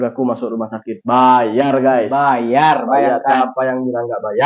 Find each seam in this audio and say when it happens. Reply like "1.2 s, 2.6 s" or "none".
none